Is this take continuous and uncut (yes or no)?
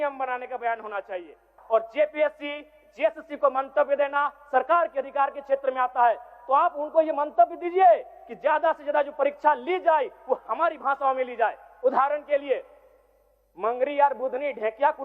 no